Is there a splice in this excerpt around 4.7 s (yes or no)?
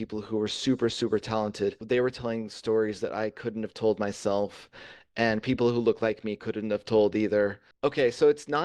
no